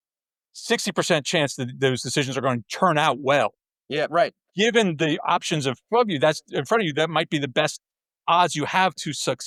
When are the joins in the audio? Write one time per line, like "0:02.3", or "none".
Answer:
none